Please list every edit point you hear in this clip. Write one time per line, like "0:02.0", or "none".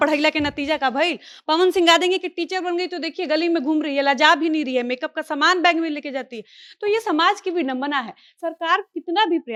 none